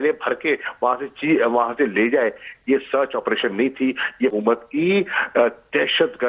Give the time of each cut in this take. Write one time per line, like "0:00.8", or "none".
0:04.3